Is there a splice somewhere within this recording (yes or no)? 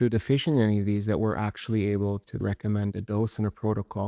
yes